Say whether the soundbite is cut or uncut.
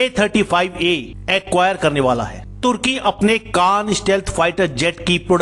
cut